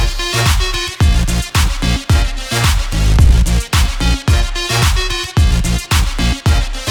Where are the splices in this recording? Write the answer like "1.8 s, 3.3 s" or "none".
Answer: none